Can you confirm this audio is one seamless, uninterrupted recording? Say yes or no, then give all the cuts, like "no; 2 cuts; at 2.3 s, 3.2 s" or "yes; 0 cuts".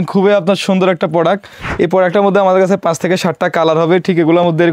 yes; 0 cuts